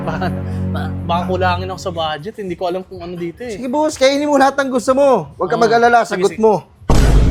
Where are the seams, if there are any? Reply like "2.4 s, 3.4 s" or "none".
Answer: none